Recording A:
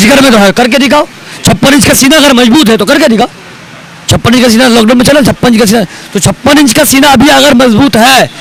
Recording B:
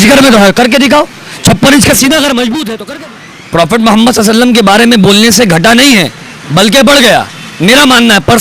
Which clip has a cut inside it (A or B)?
B